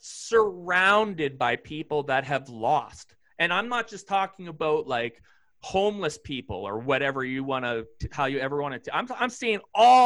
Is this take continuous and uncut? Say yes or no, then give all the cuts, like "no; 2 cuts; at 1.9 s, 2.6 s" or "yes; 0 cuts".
yes; 0 cuts